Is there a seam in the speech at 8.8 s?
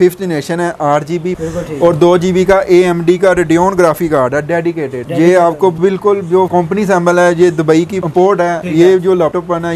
no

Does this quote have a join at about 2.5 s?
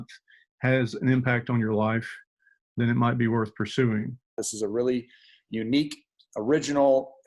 no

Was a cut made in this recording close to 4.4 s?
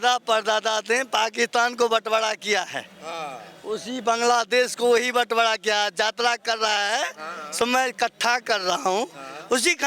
no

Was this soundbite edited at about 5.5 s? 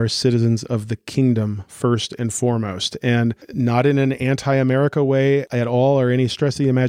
yes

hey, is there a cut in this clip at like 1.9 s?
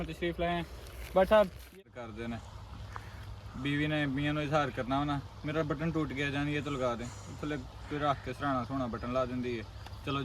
yes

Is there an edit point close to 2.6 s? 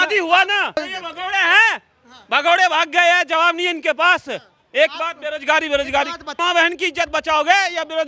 no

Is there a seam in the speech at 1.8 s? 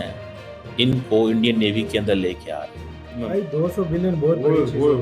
no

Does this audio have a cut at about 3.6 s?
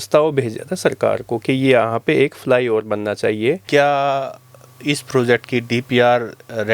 yes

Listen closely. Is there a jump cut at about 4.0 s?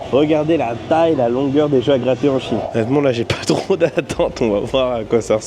no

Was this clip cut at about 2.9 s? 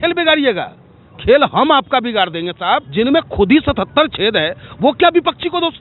yes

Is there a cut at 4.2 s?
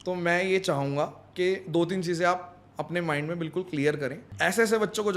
yes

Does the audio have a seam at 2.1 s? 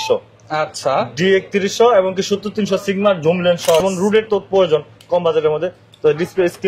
no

